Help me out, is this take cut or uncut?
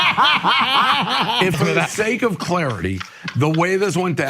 cut